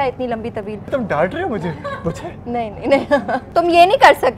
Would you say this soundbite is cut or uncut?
cut